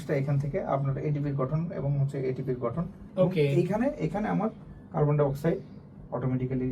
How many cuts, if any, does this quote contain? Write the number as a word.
one